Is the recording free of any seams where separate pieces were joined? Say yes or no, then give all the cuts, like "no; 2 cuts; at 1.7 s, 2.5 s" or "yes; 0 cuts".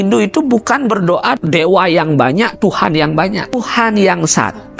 no; 2 cuts; at 1.4 s, 3.6 s